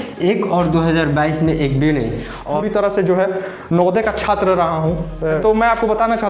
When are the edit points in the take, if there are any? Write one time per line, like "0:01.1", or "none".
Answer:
0:02.5